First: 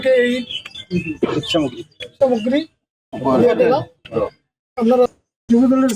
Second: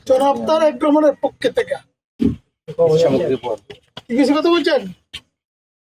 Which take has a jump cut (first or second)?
first